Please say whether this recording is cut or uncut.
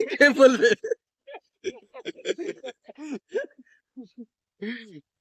uncut